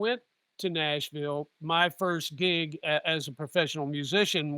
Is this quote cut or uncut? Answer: cut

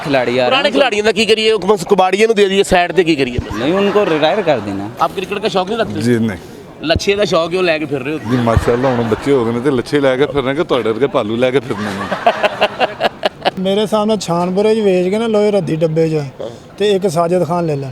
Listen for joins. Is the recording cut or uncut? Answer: cut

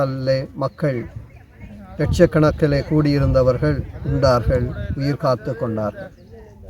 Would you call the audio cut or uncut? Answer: uncut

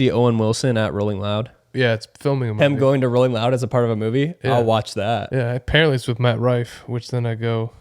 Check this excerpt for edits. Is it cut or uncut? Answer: cut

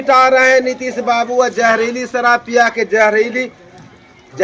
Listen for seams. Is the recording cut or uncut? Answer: uncut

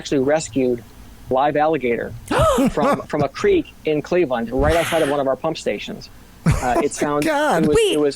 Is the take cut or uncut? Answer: uncut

